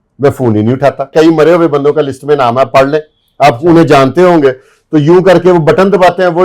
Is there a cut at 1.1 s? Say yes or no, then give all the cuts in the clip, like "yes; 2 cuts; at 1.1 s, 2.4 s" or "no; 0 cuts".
yes; 1 cut; at 1.1 s